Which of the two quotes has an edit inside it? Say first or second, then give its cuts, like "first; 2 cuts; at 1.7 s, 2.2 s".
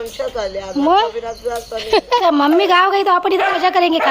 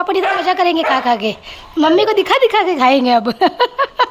first; 1 cut; at 2.2 s